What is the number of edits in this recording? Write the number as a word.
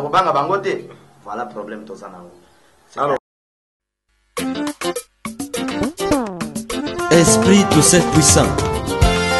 one